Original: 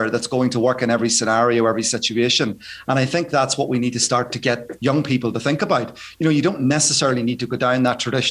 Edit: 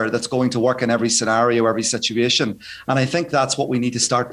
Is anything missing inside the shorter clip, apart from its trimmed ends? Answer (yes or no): no